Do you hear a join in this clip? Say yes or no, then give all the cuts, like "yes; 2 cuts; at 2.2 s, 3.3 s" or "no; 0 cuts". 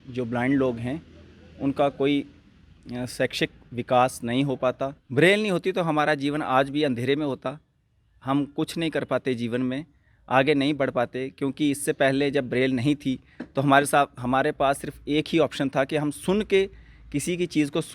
yes; 1 cut; at 5.0 s